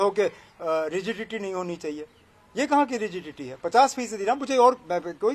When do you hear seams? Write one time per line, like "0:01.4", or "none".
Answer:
none